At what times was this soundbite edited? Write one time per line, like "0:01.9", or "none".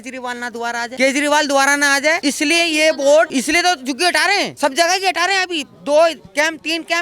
0:00.9
0:02.2
0:03.3
0:04.5